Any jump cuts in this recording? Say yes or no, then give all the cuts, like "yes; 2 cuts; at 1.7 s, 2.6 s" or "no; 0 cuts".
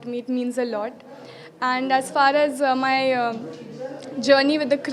no; 0 cuts